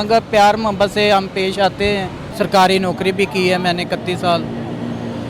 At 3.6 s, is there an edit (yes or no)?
no